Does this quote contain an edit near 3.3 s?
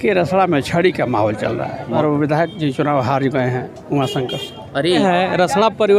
no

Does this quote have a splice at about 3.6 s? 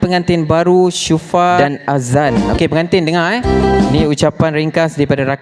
no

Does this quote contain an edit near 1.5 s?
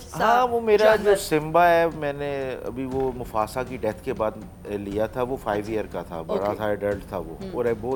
no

